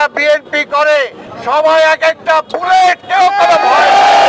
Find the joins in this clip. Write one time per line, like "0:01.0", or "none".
0:01.3